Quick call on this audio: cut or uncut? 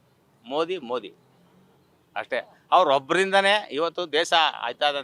uncut